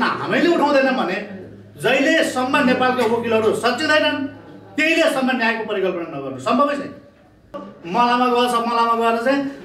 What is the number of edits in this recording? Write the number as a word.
one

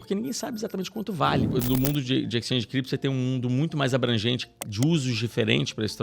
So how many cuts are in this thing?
one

